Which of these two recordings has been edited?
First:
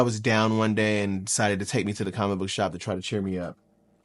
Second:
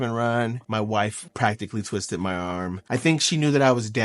second; 2 cuts; at 1.2 s, 2.8 s

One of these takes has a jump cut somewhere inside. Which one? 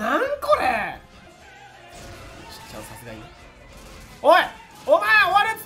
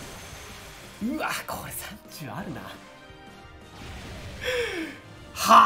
first; 1 cut; at 1.3 s

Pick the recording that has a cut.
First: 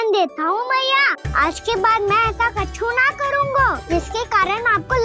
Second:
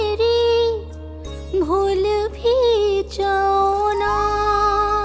first; 2 cuts; at 1.2 s, 3.8 s

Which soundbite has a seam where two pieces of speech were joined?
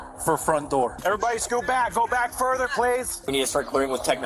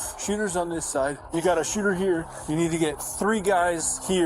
first; 2 cuts; at 1.0 s, 3.2 s

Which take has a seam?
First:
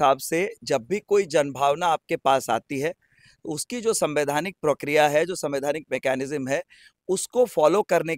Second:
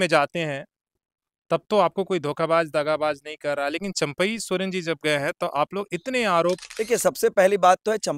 second; 1 cut; at 6.7 s

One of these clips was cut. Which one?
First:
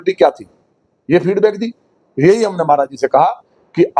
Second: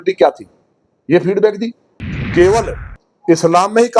second; 1 cut; at 2.0 s

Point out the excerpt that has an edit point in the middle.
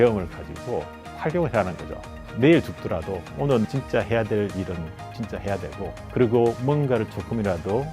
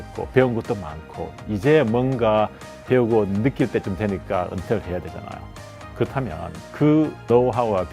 first; 3 cuts; at 2.1 s, 3.6 s, 6.0 s

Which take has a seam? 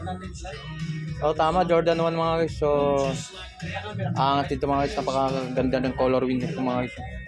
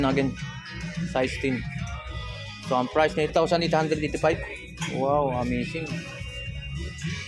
second; 1 cut; at 3.3 s

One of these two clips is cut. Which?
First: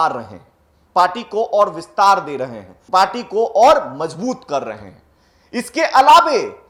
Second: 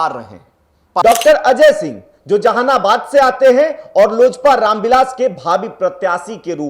second; 1 cut; at 1.0 s

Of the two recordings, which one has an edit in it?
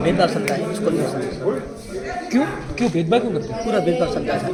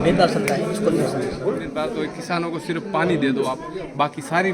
second; 1 cut; at 1.8 s

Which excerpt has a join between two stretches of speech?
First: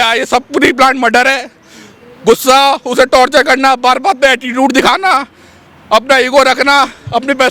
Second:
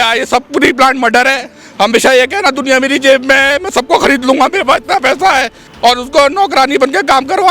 second; 2 cuts; at 1.6 s, 5.6 s

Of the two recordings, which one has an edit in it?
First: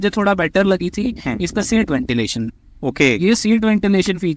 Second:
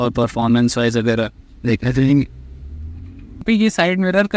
second; 1 cut; at 3.4 s

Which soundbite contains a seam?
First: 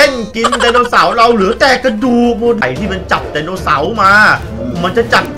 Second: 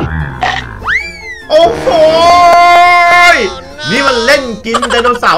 first; 1 cut; at 2.6 s

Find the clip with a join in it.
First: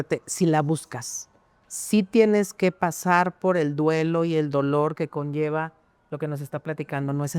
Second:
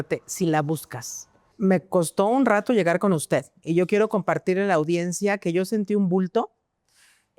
second; 1 cut; at 1.4 s

